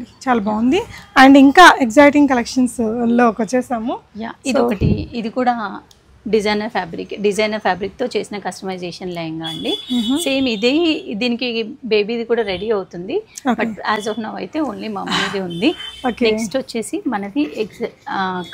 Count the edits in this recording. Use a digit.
0